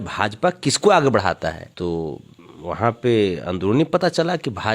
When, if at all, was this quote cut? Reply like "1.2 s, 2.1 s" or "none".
1.7 s